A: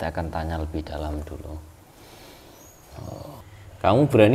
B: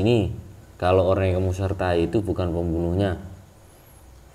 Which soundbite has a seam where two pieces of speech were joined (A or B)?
A